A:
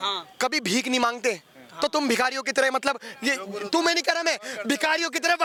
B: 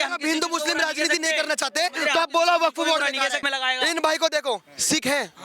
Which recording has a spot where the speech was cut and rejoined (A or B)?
B